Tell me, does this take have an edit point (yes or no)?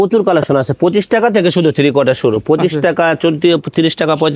no